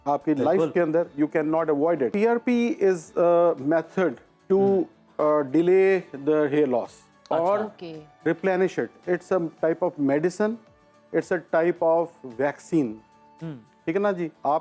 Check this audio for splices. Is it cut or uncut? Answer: cut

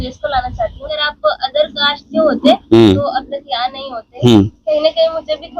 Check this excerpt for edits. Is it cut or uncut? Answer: cut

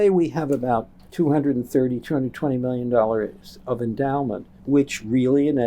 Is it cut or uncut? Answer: cut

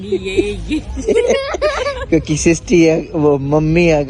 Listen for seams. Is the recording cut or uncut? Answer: uncut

